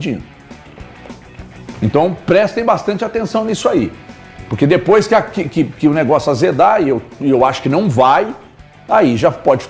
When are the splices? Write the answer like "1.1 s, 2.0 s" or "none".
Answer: none